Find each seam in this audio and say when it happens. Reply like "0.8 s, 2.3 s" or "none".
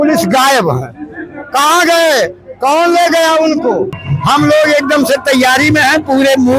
4.1 s